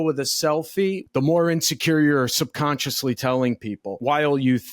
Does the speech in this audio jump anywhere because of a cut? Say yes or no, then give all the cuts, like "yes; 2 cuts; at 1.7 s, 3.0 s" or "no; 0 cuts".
yes; 2 cuts; at 1.0 s, 4.0 s